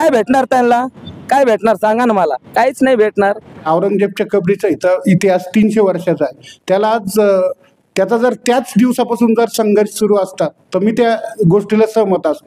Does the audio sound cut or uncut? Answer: cut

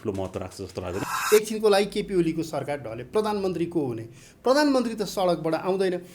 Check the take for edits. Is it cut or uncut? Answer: cut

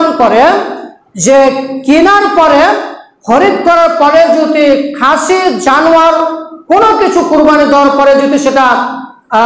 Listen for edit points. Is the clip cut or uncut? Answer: uncut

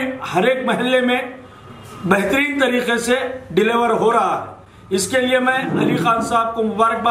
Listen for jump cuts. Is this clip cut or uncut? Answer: uncut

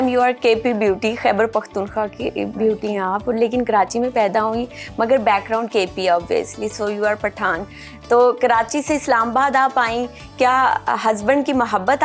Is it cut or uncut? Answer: uncut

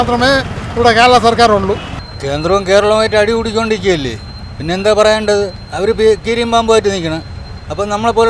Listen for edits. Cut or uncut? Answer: cut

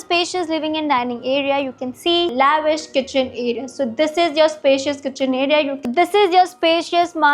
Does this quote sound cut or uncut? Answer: cut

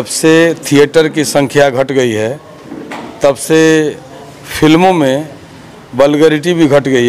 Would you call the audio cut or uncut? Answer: uncut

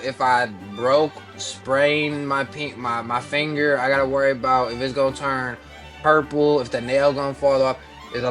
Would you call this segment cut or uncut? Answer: uncut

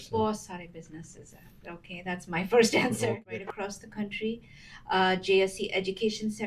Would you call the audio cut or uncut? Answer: cut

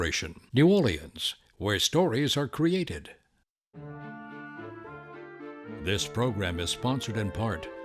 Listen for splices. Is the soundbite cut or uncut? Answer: cut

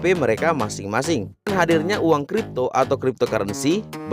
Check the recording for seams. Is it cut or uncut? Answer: cut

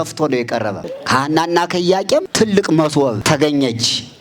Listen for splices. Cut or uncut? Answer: cut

